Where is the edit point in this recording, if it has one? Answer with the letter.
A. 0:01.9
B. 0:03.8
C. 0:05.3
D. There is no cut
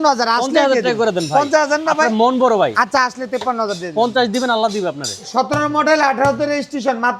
C